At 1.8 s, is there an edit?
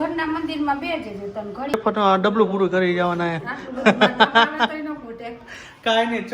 yes; 1 cut; at 1.8 s

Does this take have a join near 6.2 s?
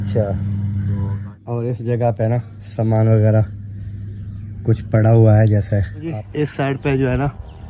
yes; 2 cuts; at 1.2 s, 6.2 s

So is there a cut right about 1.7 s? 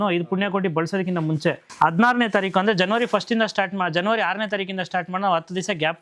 yes; 1 cut; at 1.7 s

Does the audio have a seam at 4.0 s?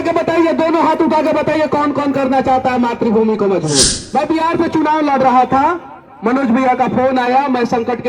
yes; 1 cut; at 4.0 s

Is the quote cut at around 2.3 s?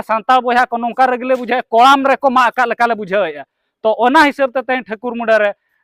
no; 0 cuts

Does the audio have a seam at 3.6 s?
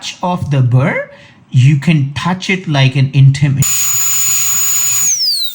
yes; 1 cut; at 3.6 s

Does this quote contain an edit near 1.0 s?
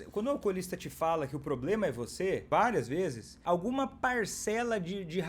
no; 2 cuts; at 2.4 s, 3.3 s

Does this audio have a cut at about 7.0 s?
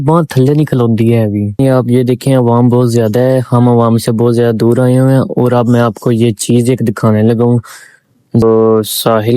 no; 2 cuts; at 1.6 s, 8.4 s

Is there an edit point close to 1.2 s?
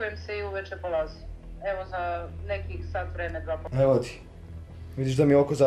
no; 1 cut; at 3.6 s

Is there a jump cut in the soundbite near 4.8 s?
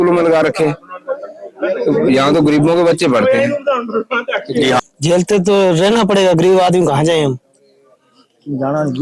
yes; 1 cut; at 4.8 s

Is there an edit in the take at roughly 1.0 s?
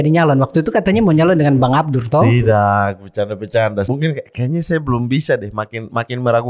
no; 1 cut; at 3.9 s

